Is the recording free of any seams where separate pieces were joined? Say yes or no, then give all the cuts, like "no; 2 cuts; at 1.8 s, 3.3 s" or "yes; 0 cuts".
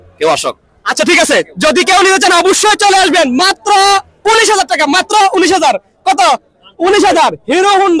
yes; 0 cuts